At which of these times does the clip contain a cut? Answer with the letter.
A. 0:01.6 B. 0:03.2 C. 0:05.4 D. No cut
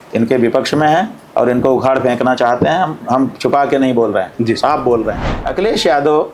C